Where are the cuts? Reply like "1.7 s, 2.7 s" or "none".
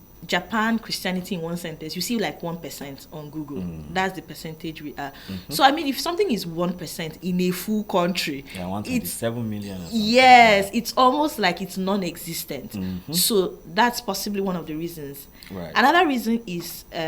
none